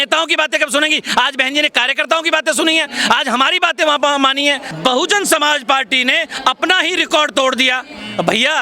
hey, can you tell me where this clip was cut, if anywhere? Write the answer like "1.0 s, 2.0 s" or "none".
4.7 s